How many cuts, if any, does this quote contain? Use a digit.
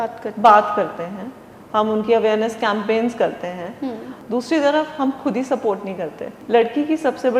2